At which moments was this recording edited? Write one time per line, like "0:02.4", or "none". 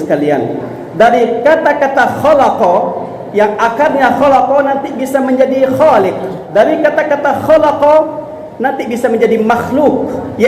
0:06.4